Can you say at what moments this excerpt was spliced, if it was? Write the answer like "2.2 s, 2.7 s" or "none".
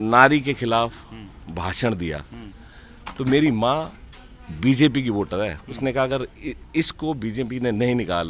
none